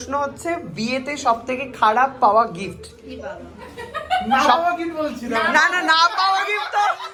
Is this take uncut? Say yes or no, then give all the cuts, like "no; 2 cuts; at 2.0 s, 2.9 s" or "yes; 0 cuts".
yes; 0 cuts